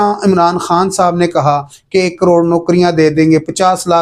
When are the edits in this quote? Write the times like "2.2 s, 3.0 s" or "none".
none